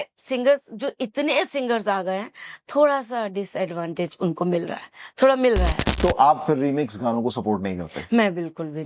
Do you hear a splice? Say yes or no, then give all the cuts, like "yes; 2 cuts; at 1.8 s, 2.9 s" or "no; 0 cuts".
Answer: yes; 1 cut; at 5.8 s